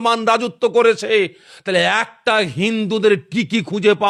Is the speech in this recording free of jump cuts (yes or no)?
yes